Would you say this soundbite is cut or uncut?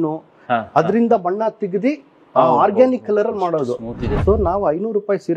cut